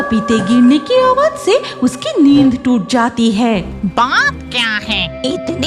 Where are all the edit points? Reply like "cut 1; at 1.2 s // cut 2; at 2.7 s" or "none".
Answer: cut 1; at 3.7 s